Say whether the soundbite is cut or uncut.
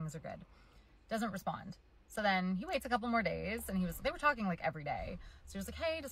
cut